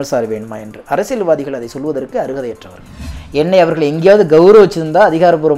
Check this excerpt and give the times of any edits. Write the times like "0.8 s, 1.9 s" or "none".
3.1 s